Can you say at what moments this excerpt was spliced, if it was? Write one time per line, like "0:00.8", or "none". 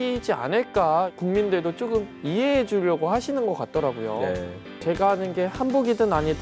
0:01.1